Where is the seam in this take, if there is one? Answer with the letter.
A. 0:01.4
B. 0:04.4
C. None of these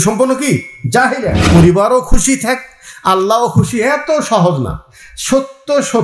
A